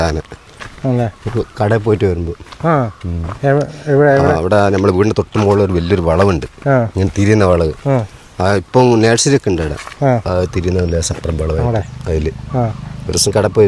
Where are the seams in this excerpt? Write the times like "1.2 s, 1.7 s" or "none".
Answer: 10.2 s